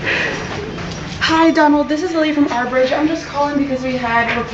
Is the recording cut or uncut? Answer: cut